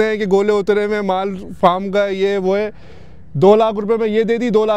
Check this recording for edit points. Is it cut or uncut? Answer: uncut